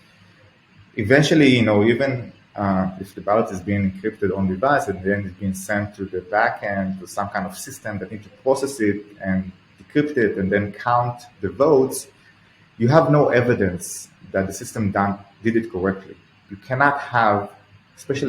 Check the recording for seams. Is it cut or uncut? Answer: cut